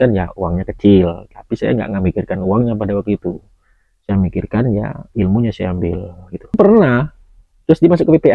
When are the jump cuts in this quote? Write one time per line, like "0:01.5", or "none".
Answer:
0:06.5